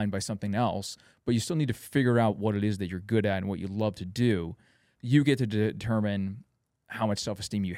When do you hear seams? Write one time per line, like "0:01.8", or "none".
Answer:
0:04.9